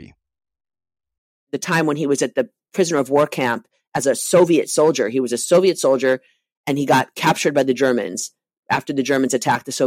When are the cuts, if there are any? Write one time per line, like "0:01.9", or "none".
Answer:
0:01.5